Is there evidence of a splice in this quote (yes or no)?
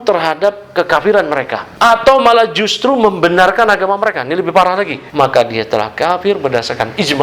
yes